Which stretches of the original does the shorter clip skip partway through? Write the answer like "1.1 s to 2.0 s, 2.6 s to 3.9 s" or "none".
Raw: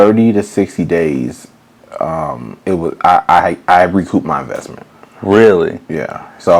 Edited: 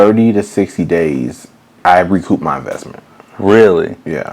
1.8 s to 3.6 s